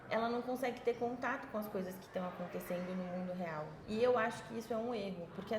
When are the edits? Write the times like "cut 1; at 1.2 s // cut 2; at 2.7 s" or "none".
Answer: cut 1; at 3.8 s